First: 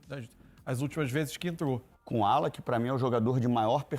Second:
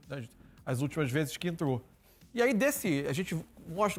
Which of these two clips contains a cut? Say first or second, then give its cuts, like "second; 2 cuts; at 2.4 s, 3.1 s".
first; 1 cut; at 1.9 s